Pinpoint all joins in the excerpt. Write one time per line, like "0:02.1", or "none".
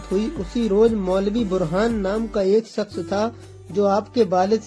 none